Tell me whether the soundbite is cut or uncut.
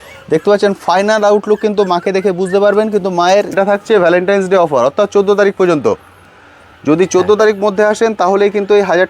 cut